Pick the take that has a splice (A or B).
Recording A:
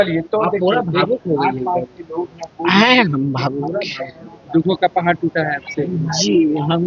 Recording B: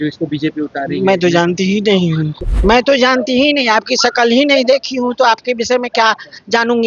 B